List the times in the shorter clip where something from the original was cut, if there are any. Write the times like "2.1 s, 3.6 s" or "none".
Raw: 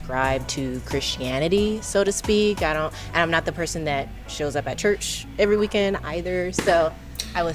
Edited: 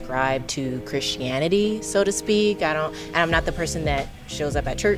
none